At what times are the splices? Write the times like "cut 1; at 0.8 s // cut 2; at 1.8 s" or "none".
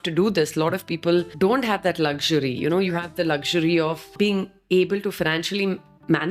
cut 1; at 1.3 s // cut 2; at 4.1 s